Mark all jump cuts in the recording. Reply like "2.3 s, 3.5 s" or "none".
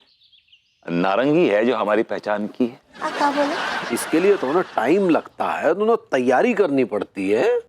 3.8 s

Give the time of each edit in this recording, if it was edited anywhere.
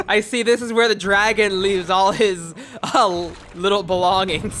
3.4 s

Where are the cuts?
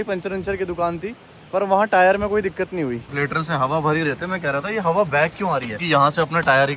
3.1 s, 5.8 s

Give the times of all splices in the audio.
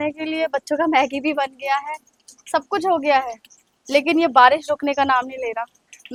none

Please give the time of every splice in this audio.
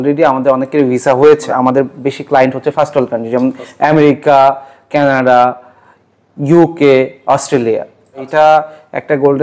1.5 s, 8.2 s

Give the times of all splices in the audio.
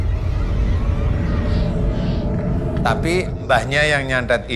2.8 s

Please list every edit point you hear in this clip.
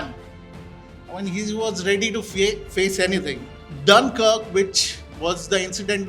none

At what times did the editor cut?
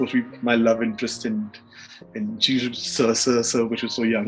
none

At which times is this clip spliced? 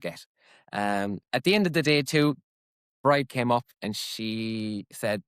1.2 s, 2.9 s

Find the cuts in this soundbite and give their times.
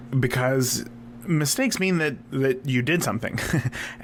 none

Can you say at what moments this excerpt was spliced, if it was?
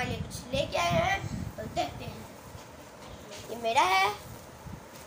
none

